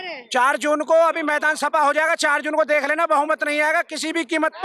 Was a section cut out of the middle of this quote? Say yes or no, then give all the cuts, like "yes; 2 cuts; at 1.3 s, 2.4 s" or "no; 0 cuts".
no; 0 cuts